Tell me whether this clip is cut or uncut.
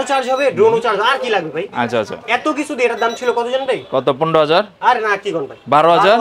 uncut